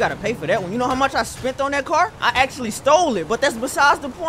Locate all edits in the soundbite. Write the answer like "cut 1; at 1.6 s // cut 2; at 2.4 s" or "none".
cut 1; at 2.1 s